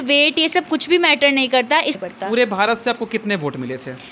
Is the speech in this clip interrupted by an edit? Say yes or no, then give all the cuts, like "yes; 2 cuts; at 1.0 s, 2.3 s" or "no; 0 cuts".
yes; 1 cut; at 1.9 s